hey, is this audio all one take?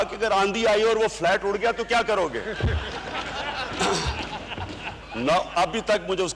yes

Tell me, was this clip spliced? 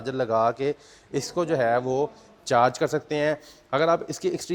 no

